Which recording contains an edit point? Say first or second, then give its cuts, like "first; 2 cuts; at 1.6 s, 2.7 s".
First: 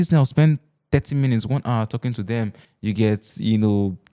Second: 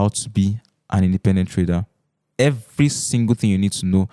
first; 1 cut; at 2.6 s